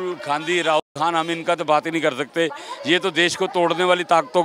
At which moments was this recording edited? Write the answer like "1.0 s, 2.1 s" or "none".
none